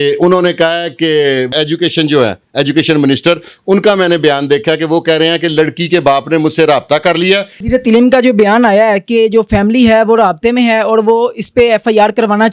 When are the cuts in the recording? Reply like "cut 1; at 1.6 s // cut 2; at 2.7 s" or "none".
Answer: cut 1; at 1.5 s // cut 2; at 7.5 s